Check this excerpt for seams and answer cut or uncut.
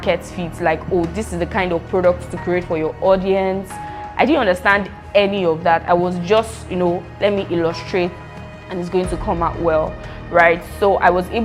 uncut